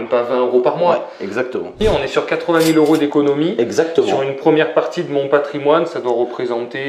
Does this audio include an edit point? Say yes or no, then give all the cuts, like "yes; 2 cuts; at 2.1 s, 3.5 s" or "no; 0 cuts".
yes; 1 cut; at 1.8 s